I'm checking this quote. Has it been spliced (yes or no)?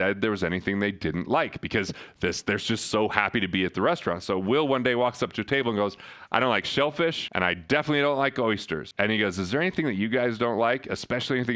yes